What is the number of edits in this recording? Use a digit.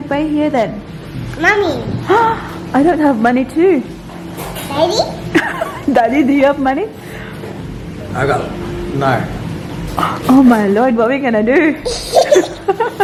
0